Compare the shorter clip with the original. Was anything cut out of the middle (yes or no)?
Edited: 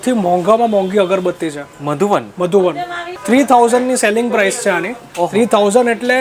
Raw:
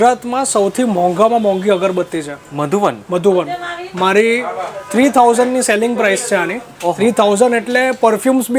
yes